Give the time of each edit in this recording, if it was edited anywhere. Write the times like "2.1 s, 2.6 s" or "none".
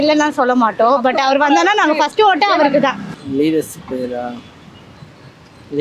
none